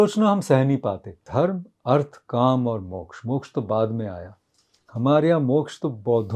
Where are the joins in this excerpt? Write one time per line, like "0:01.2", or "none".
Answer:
0:01.1